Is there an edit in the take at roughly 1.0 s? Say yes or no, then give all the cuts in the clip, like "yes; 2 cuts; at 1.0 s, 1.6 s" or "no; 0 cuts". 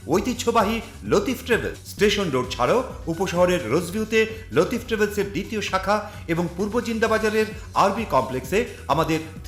no; 0 cuts